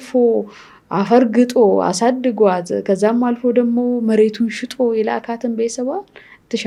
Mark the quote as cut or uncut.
uncut